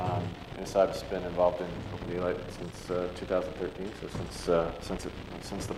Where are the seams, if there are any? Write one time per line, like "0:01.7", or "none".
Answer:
none

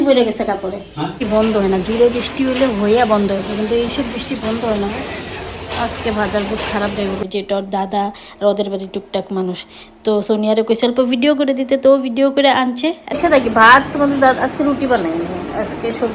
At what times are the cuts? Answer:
0:01.2
0:07.2
0:13.1

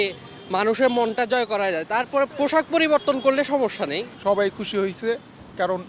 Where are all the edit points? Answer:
0:02.3
0:04.1

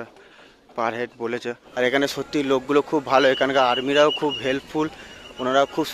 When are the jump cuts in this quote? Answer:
0:01.6

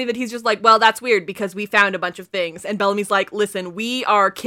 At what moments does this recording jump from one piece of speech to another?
none

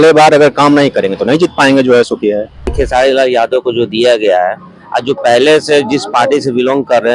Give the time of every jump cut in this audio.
0:02.7

